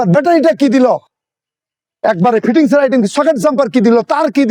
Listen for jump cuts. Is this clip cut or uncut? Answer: uncut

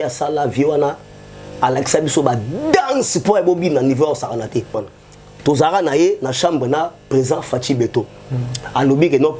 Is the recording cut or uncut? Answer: cut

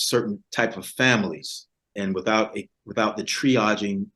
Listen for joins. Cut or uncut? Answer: cut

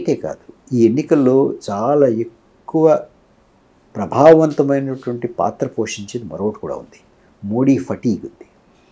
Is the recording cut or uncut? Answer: uncut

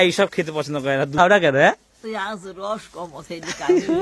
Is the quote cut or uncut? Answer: cut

